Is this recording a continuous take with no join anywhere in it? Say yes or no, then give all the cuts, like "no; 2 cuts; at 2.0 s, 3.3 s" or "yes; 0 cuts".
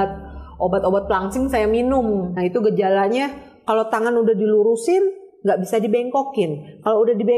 no; 1 cut; at 2.3 s